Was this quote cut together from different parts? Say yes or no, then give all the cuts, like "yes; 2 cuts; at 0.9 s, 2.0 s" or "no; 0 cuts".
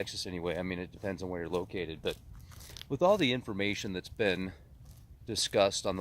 yes; 1 cut; at 2.3 s